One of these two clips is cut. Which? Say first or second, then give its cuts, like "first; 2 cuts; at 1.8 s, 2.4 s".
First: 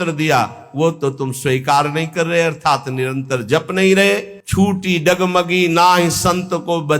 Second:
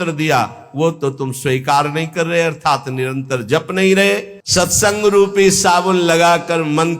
second; 1 cut; at 4.4 s